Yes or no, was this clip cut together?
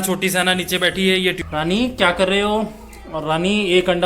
yes